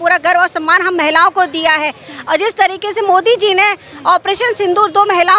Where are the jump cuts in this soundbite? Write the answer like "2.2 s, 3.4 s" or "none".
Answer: none